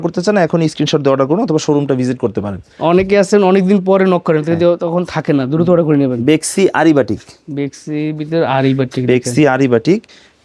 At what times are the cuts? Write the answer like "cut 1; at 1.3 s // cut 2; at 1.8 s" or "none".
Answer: none